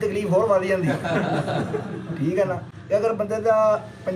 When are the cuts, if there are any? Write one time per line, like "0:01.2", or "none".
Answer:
none